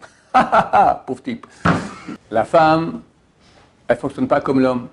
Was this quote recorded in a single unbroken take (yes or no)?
no